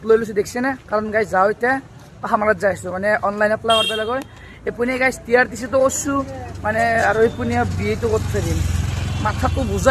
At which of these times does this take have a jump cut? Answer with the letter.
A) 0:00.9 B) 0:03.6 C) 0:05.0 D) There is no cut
D